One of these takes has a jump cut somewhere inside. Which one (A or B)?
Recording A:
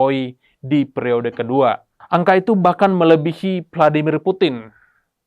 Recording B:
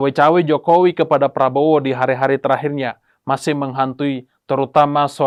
A